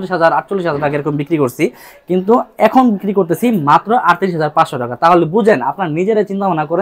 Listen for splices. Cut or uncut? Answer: uncut